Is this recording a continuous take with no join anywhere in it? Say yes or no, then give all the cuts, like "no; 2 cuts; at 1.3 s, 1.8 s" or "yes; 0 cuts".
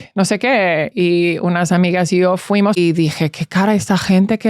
no; 1 cut; at 2.8 s